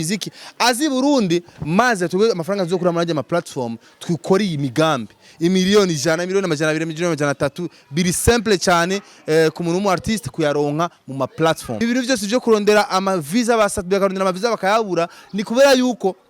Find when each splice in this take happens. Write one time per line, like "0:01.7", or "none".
0:11.7